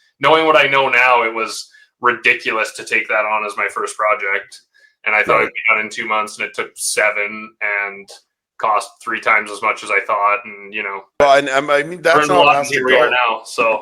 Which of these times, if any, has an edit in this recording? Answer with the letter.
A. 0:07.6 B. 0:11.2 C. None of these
B